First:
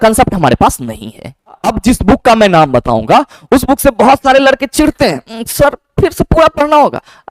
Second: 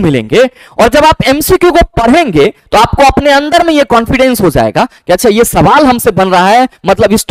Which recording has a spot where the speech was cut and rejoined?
first; 1 cut; at 1.6 s

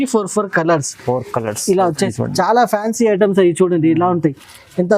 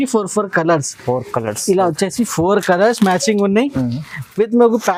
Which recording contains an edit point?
first; 1 cut; at 2.1 s

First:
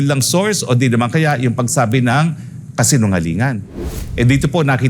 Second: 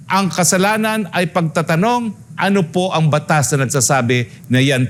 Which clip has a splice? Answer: first; 1 cut; at 3.9 s

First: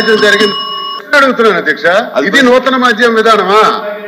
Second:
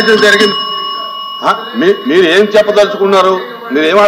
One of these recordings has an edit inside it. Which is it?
first; 1 cut; at 0.9 s

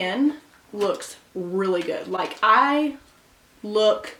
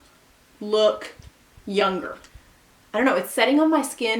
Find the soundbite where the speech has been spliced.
second; 1 cut; at 2.2 s

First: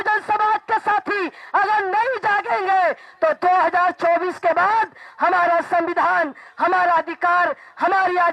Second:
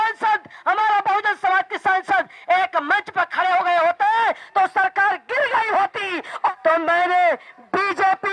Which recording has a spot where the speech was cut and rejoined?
second; 1 cut; at 6.5 s

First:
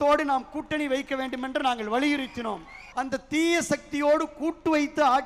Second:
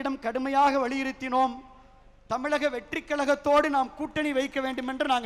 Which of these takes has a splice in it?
first; 1 cut; at 2.8 s

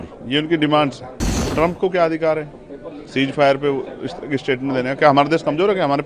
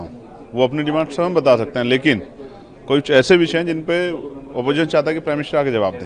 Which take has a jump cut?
first; 1 cut; at 1.4 s

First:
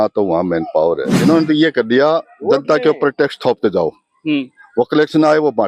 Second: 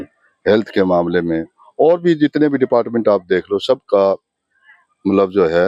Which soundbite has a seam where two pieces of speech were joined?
first; 1 cut; at 1.1 s

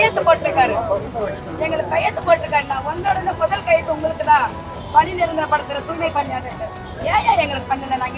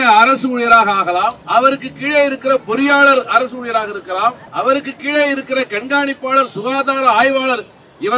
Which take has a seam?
second; 2 cuts; at 1.4 s, 4.4 s

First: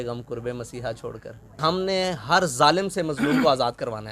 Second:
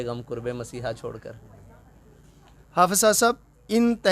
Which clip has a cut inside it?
first; 1 cut; at 1.6 s

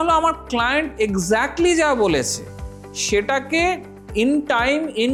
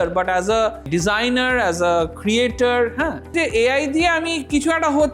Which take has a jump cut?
second; 2 cuts; at 0.8 s, 3.3 s

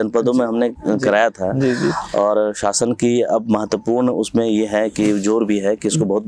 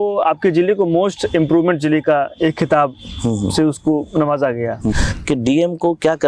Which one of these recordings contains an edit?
second; 1 cut; at 5.1 s

